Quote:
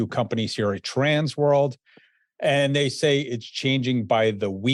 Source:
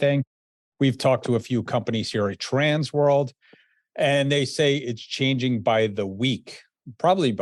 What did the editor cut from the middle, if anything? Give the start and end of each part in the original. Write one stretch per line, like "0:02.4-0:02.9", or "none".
none